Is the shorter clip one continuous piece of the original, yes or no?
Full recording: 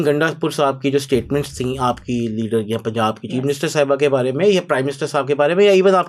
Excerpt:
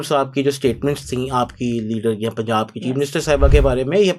yes